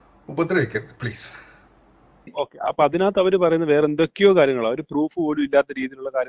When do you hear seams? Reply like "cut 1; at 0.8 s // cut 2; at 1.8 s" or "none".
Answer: cut 1; at 2.4 s